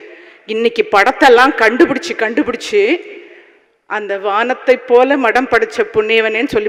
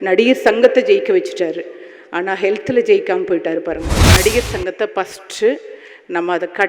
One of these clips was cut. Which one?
second; 1 cut; at 4.1 s

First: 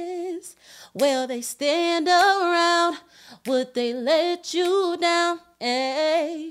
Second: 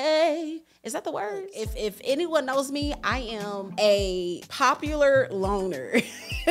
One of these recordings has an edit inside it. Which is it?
second; 3 cuts; at 1.5 s, 3.7 s, 4.4 s

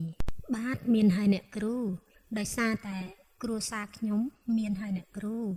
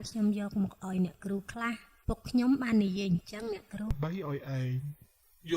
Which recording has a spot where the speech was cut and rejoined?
second; 1 cut; at 3.9 s

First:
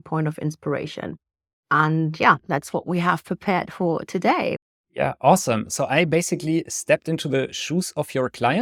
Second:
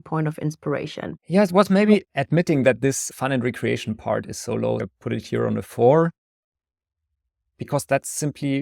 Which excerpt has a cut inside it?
second; 2 cuts; at 1.2 s, 4.8 s

